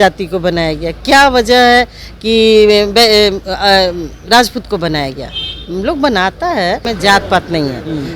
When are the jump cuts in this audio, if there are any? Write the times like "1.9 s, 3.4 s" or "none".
6.8 s

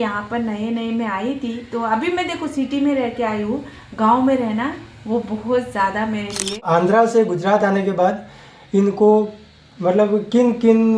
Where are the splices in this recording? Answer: 6.6 s

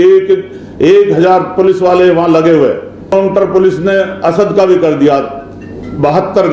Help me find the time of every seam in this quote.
3.1 s

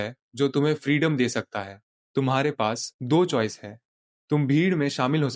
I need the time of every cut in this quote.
none

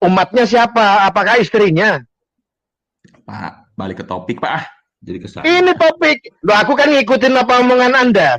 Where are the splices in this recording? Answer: none

